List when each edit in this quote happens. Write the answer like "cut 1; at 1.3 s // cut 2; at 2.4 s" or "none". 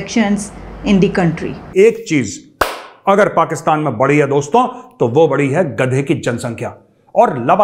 cut 1; at 1.6 s